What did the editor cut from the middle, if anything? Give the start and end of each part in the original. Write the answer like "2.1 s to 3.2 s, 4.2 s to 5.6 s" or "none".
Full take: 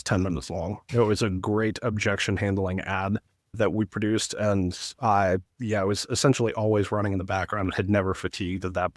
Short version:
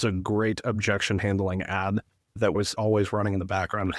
3.9 s to 6.5 s